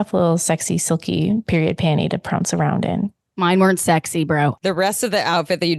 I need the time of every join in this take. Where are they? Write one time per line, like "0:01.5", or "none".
0:04.6